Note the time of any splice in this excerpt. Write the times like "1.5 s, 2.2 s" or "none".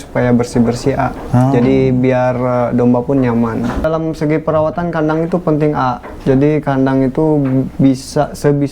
3.8 s